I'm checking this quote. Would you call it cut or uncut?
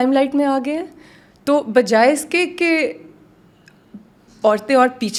uncut